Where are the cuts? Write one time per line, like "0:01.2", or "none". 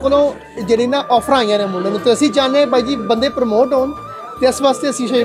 none